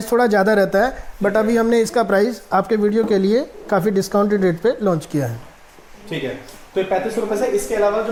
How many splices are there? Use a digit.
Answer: 0